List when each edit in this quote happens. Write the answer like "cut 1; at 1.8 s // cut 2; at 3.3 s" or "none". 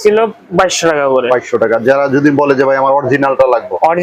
none